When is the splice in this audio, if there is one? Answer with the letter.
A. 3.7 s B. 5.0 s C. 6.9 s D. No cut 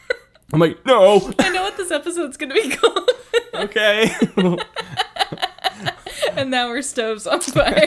D